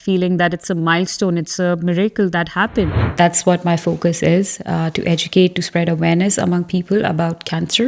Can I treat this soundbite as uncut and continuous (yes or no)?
no